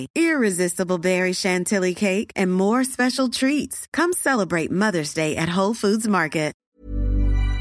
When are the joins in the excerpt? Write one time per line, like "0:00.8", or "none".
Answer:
0:06.6